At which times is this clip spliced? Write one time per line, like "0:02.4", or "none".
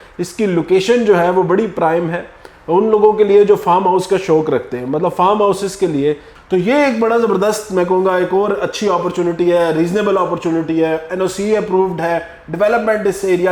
0:06.3